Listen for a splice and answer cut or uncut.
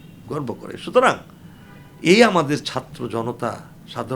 uncut